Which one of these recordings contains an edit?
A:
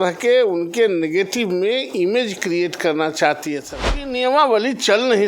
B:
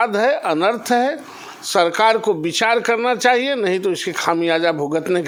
A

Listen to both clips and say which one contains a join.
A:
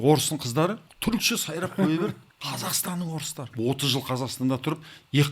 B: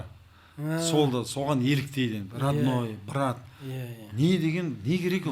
A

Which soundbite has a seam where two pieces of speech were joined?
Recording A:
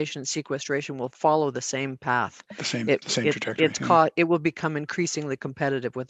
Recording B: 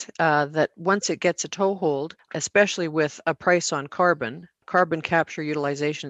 B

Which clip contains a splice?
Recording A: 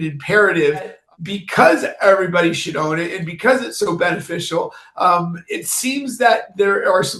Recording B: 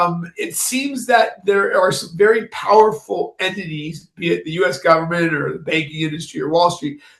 A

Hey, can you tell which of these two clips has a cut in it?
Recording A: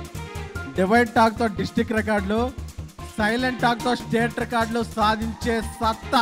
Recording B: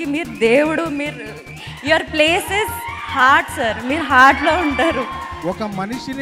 B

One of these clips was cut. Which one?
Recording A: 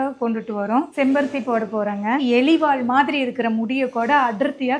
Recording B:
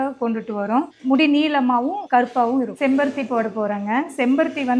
A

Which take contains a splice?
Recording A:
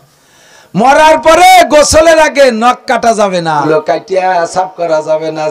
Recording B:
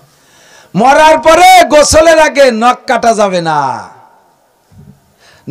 A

